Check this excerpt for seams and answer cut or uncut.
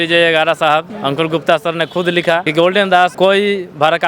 cut